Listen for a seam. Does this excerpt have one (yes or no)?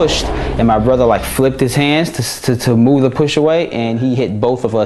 no